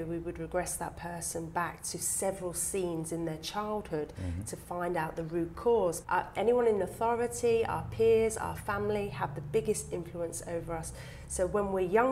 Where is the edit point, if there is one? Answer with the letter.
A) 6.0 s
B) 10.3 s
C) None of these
A